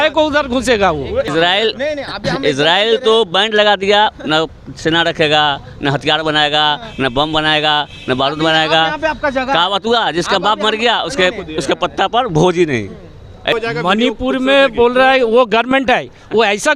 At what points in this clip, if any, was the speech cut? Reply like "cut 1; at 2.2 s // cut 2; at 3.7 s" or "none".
cut 1; at 1.3 s // cut 2; at 13.5 s